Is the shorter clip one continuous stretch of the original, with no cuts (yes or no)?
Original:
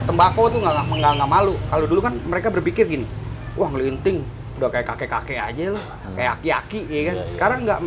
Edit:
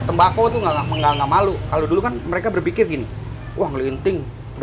yes